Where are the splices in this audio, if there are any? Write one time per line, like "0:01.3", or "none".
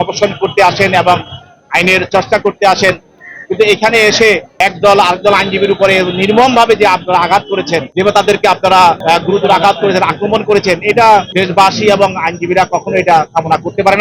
0:09.0
0:11.3